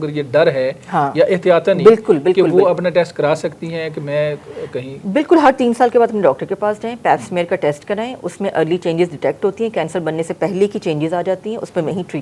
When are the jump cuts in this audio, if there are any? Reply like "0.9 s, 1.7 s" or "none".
none